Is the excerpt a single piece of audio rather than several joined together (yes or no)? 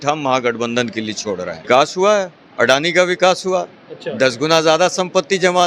no